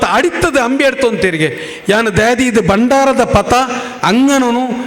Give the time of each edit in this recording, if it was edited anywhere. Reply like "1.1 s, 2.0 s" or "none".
none